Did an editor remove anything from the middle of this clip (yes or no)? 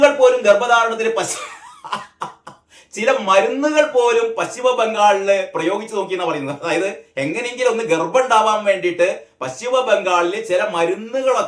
no